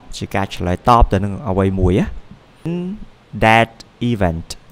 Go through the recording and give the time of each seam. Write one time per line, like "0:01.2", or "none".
0:02.7